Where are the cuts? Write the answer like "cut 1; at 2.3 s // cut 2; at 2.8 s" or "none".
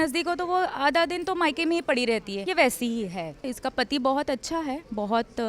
cut 1; at 2.3 s // cut 2; at 3.5 s